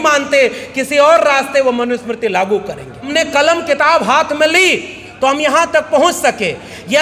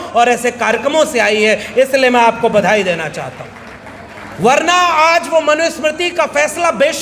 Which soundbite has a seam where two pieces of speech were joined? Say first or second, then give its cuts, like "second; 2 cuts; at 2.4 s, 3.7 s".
first; 1 cut; at 3.1 s